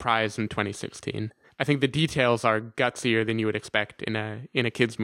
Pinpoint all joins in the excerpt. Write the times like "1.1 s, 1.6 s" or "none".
1.6 s